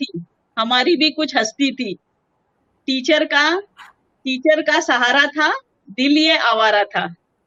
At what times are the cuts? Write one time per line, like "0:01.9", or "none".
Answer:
none